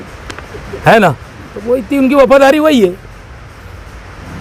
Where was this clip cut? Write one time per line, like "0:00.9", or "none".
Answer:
none